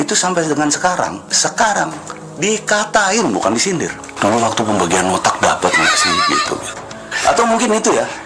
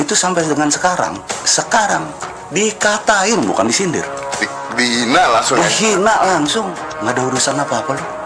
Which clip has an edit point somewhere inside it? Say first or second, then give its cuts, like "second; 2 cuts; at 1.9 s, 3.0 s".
first; 2 cuts; at 1.2 s, 4.0 s